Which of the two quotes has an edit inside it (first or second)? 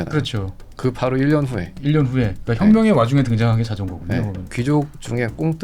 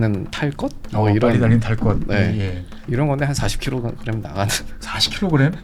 first